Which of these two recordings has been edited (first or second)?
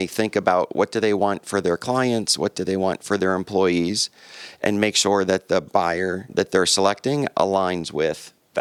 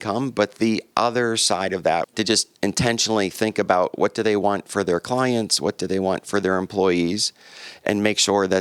second